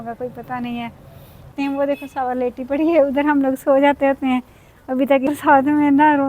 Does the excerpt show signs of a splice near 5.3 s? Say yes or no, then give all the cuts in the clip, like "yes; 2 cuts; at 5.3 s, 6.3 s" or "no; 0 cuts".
yes; 2 cuts; at 1.5 s, 5.3 s